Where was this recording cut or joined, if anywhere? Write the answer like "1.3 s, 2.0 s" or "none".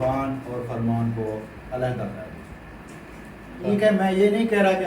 3.6 s

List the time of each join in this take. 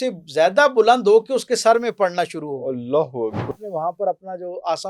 3.5 s

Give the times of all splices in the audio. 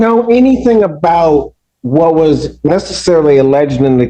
none

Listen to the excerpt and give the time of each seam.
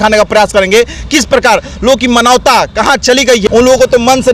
3.4 s

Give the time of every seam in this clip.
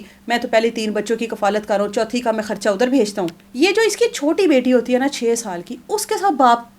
3.4 s

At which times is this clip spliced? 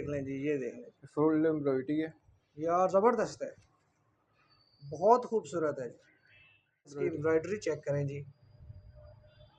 7.0 s

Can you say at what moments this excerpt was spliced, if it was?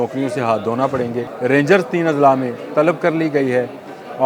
1.3 s

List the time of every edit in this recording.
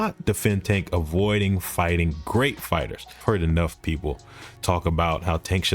3.1 s

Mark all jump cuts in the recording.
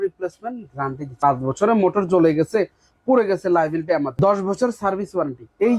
1.0 s, 4.1 s

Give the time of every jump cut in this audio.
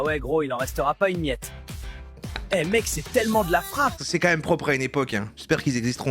4.0 s

